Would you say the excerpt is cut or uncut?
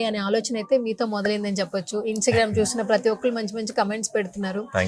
uncut